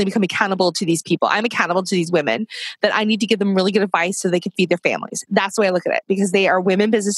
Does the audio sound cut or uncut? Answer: uncut